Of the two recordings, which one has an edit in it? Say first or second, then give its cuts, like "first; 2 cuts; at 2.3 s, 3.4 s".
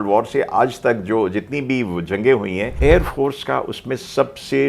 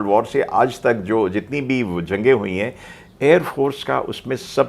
first; 1 cut; at 2.7 s